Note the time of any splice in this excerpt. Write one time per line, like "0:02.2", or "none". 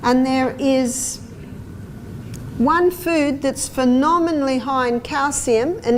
none